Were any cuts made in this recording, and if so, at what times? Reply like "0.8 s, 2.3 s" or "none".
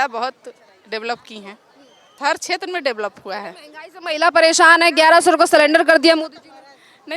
2.1 s